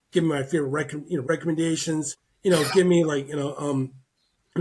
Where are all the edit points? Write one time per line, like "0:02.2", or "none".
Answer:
0:01.3
0:02.2